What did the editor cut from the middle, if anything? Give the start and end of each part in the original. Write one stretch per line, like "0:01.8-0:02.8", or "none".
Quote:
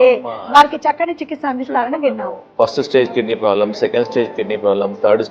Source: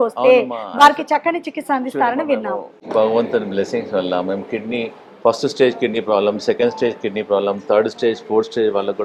0:02.7-0:05.1